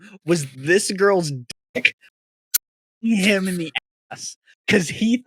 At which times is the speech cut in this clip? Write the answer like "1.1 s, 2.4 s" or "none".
none